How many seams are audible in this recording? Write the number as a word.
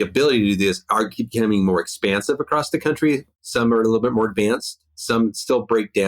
one